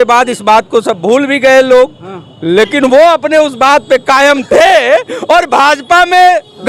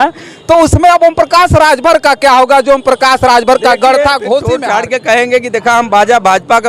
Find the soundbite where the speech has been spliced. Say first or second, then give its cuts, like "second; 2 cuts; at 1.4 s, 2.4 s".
second; 1 cut; at 4.5 s